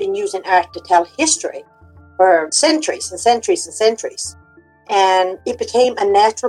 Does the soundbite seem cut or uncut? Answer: cut